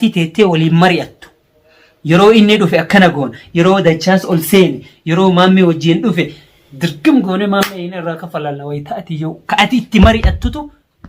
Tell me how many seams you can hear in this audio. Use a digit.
0